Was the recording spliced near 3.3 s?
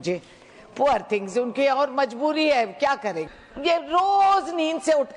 yes; 1 cut; at 3.3 s

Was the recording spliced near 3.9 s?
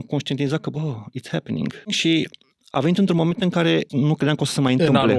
yes; 2 cuts; at 2.0 s, 3.9 s

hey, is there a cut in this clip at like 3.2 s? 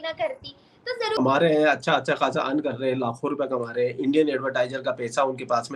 no; 1 cut; at 1.2 s

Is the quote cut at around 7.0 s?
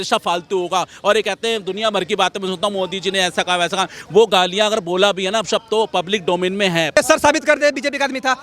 yes; 1 cut; at 7.0 s

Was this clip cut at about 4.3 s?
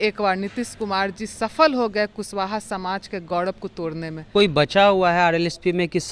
yes; 1 cut; at 4.3 s

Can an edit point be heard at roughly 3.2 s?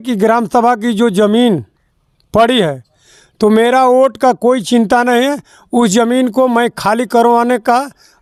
no; 0 cuts

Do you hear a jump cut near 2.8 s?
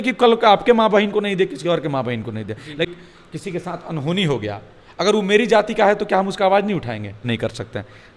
yes; 2 cuts; at 2.8 s, 7.2 s

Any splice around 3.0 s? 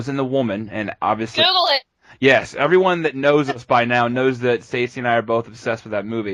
yes; 1 cut; at 3.0 s

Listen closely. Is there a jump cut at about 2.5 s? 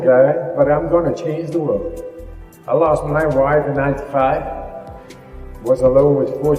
yes; 1 cut; at 2.5 s

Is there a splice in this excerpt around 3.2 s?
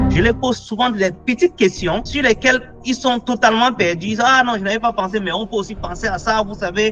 no; 0 cuts

